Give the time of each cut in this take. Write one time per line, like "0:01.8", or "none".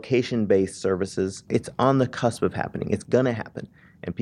0:01.4